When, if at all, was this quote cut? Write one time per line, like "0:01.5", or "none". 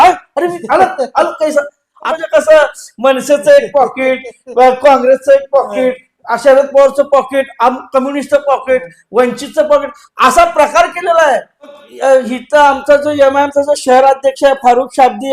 0:02.0
0:11.8